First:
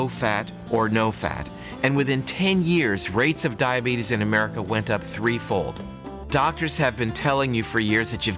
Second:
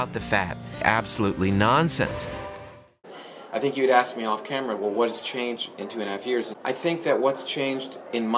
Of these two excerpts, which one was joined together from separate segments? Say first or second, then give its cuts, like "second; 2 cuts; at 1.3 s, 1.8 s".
second; 2 cuts; at 2.9 s, 6.5 s